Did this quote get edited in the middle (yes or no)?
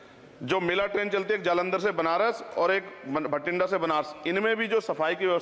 no